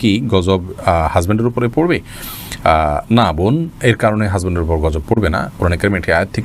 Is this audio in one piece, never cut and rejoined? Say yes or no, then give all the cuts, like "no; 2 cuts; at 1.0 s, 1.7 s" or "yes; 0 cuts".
yes; 0 cuts